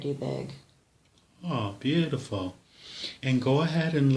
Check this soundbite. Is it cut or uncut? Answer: uncut